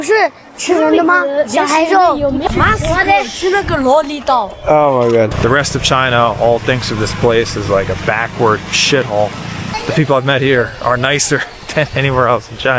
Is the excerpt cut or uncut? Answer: cut